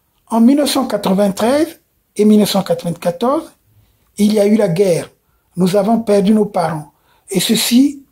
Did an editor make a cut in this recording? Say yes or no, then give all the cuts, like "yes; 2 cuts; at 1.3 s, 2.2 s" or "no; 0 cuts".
no; 0 cuts